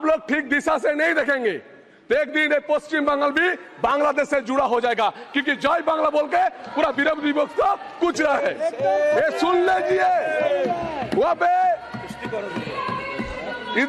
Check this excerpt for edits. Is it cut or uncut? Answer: uncut